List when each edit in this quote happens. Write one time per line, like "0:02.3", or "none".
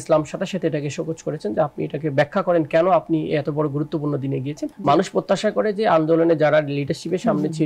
0:04.7